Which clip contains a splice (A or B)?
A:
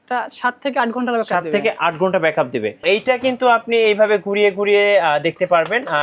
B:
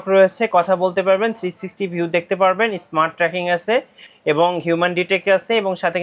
A